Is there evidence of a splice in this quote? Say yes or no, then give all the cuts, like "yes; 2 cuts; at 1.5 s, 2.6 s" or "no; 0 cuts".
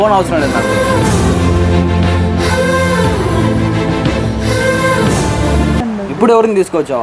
yes; 1 cut; at 5.8 s